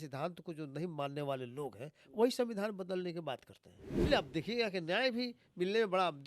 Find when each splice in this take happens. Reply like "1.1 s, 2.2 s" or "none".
4.0 s